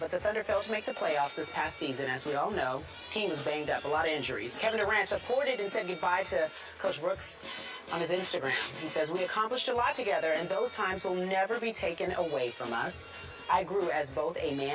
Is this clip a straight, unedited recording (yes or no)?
no